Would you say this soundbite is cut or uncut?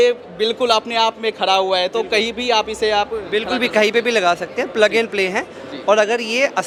uncut